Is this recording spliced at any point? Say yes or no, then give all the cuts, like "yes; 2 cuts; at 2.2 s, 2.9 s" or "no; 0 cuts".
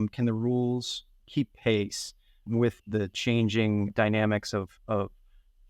yes; 3 cuts; at 1.1 s, 2.7 s, 3.9 s